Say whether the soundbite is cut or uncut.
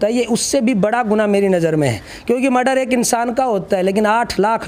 uncut